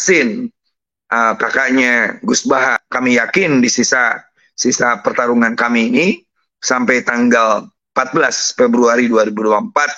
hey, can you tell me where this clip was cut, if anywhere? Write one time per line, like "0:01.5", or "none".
0:02.8

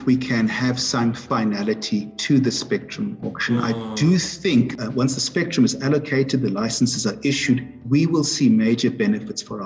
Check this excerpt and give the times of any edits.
0:01.2
0:07.7

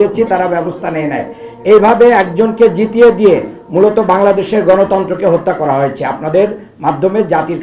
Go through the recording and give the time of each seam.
none

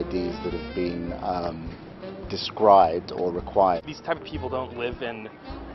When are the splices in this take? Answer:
0:03.9

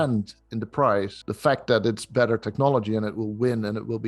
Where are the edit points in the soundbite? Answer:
0:01.2

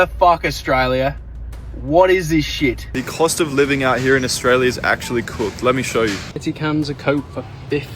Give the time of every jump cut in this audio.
0:02.9
0:06.3

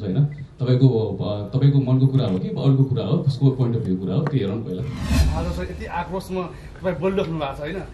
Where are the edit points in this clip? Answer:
0:05.2

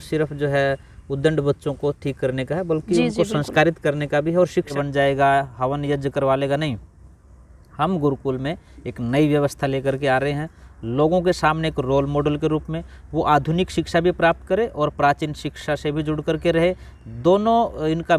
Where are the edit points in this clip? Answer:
0:04.7

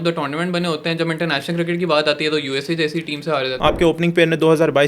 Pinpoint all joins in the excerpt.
0:03.5

